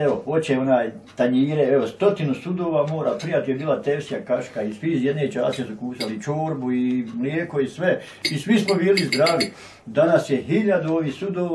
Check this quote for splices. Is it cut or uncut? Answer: uncut